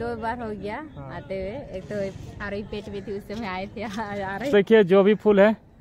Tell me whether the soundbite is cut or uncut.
cut